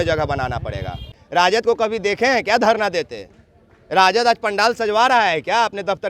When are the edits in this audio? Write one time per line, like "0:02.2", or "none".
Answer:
0:01.2